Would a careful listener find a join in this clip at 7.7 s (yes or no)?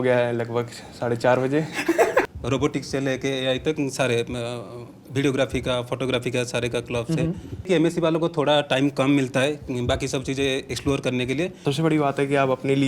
yes